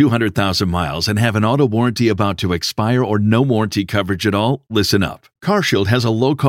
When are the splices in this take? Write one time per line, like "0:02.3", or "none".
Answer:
none